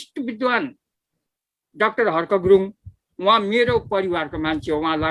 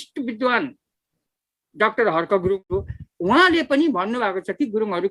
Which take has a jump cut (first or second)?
second